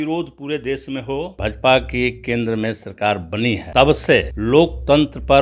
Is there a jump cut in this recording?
yes; 3 cuts; at 1.3 s, 3.6 s, 4.3 s

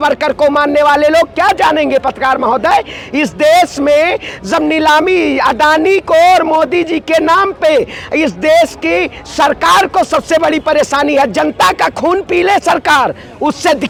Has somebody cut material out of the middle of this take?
no; 0 cuts

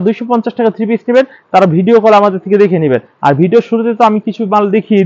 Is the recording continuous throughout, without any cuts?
yes; 0 cuts

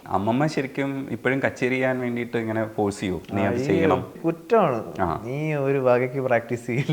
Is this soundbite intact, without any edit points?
no; 1 cut; at 4.2 s

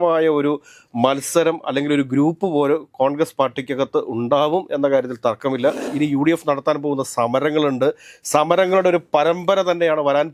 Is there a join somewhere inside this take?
yes; 1 cut; at 5.9 s

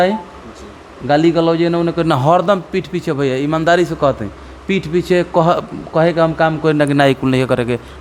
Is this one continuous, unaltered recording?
yes; 0 cuts

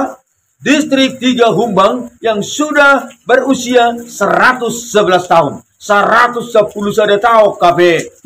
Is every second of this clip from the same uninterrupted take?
yes; 0 cuts

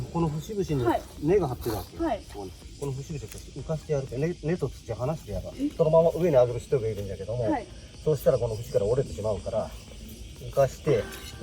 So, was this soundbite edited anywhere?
yes; 2 cuts; at 2.6 s, 5.7 s

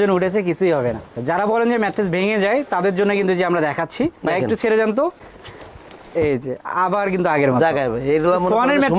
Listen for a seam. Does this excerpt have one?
no; 0 cuts

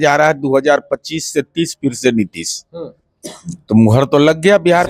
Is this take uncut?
yes; 0 cuts

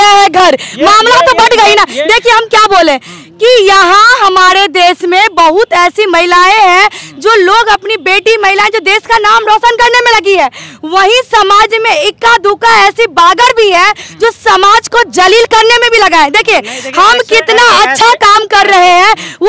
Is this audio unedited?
yes; 0 cuts

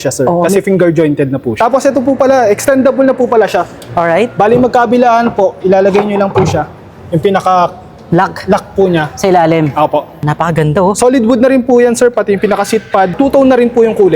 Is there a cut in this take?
yes; 3 cuts; at 1.5 s, 10.2 s, 13.1 s

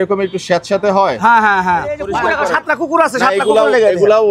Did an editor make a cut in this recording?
yes; 1 cut; at 2.1 s

